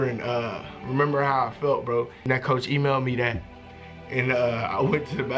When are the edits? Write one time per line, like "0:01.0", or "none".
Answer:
0:02.2